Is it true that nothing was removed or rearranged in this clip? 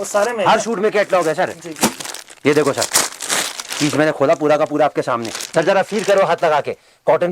yes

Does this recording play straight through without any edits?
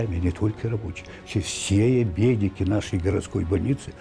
yes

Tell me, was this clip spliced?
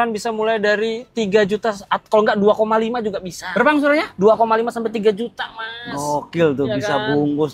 no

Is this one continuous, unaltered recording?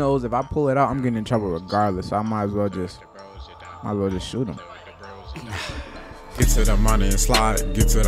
no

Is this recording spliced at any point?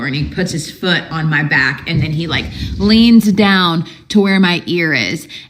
no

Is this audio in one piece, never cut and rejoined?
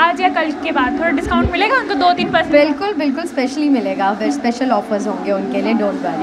yes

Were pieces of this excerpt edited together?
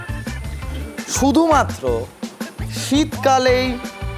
no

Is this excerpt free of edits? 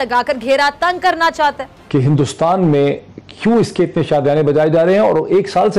no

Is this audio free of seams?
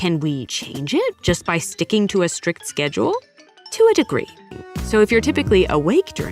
no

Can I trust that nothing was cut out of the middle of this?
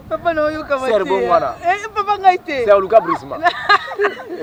yes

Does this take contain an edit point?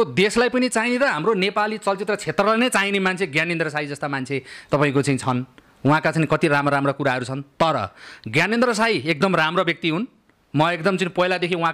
no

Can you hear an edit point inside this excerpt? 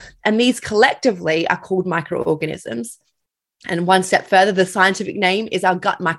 no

